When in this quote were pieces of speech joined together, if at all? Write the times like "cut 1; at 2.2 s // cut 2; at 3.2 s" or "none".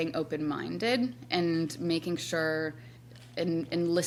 none